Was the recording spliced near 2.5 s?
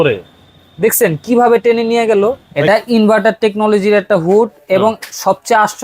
yes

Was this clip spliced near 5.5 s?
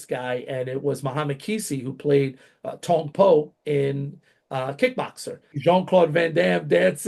yes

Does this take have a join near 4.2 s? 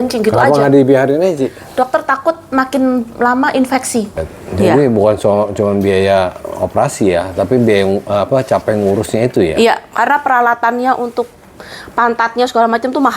yes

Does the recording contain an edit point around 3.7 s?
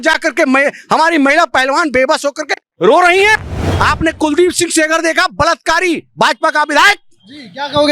yes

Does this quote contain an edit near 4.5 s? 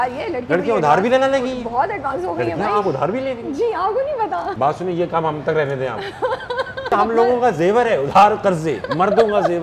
yes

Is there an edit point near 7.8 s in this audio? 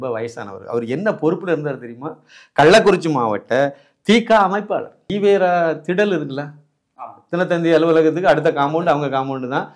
no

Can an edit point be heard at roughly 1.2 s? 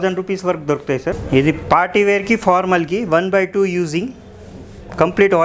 yes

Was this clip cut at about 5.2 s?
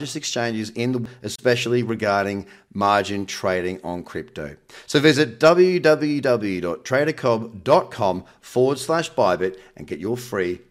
no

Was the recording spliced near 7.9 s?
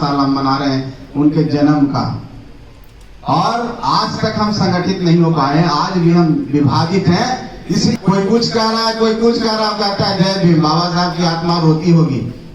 yes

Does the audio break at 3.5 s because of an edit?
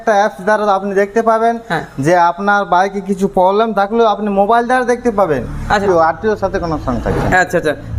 no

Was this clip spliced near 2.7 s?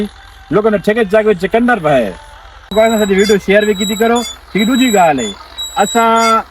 yes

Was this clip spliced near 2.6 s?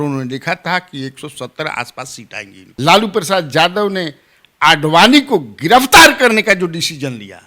yes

